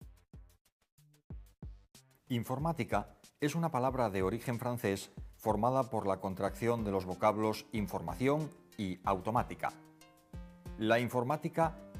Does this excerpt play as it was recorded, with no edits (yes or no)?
yes